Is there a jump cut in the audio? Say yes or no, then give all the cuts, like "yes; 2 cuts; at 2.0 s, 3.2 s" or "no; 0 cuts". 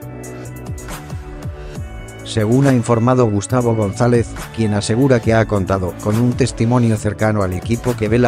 yes; 1 cut; at 1.8 s